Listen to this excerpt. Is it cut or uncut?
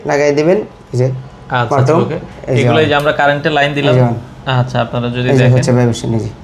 uncut